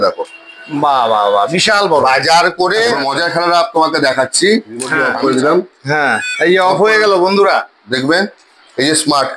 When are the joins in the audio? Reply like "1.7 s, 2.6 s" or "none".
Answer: 3.0 s, 5.0 s